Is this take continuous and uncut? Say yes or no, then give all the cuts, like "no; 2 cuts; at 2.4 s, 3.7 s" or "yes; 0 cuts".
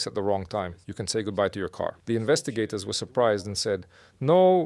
no; 1 cut; at 2.0 s